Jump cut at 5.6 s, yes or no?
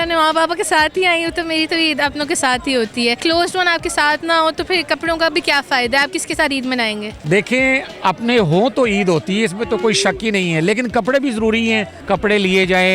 no